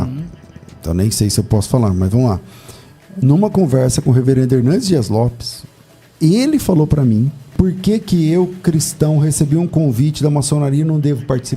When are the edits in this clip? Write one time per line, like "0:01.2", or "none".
0:07.5